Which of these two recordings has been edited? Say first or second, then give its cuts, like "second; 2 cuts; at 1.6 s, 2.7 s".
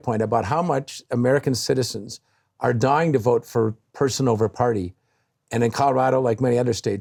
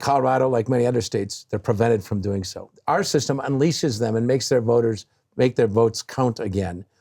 second; 1 cut; at 2.7 s